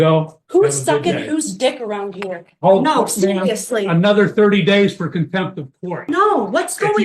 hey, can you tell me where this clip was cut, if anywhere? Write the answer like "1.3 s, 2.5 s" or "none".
6.0 s